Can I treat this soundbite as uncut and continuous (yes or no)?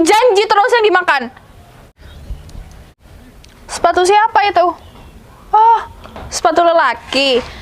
no